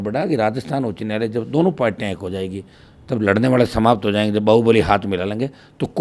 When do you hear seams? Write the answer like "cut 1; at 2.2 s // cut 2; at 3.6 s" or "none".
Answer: none